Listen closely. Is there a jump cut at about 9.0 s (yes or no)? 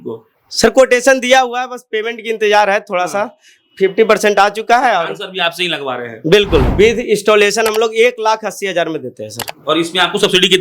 no